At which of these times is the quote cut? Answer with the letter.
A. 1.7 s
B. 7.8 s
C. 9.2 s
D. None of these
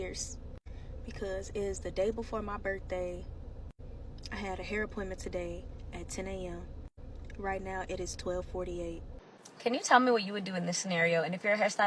C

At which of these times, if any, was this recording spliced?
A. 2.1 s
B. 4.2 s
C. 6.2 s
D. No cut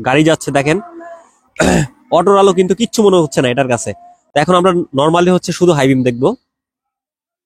D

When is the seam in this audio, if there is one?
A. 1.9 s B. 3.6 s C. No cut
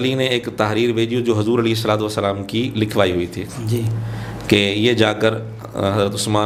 C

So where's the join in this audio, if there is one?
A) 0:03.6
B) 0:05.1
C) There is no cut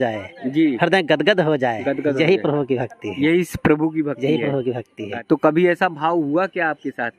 B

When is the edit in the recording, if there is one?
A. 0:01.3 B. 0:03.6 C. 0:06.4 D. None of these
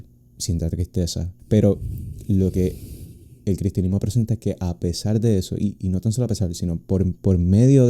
A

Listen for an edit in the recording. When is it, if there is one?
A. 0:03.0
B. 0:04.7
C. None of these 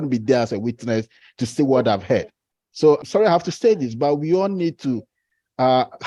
A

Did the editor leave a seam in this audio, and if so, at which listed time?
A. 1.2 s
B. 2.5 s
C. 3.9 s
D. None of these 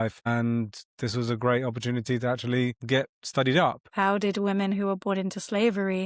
C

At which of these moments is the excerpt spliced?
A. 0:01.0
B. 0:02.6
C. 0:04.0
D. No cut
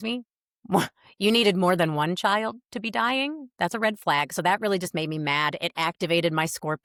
D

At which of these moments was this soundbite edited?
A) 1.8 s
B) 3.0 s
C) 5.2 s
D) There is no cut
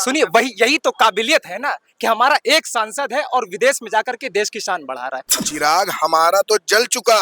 C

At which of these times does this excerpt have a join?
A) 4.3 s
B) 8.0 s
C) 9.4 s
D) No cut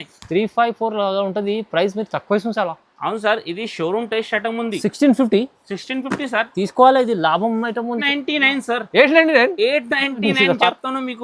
B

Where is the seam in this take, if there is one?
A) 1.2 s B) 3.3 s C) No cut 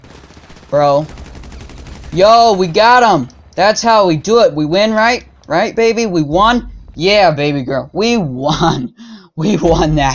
C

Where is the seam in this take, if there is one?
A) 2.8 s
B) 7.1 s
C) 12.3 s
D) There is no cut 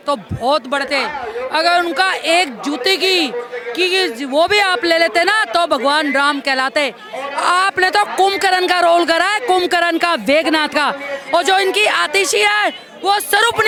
D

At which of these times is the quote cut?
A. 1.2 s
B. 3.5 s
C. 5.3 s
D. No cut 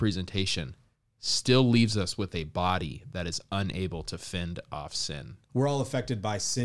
C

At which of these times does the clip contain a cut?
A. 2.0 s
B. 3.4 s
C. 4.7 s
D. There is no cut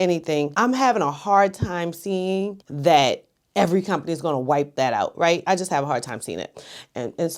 D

